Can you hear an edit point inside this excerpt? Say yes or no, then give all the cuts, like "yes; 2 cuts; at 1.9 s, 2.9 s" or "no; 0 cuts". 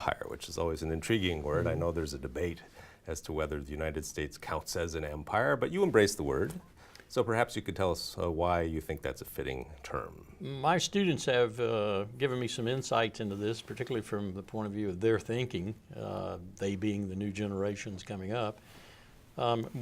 yes; 1 cut; at 11.9 s